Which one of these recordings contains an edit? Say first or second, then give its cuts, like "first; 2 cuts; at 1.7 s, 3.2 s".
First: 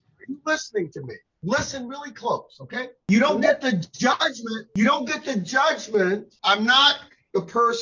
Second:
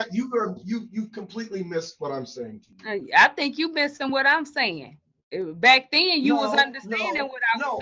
first; 2 cuts; at 3.0 s, 6.3 s